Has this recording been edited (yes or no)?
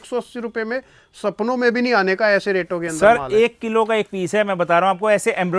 no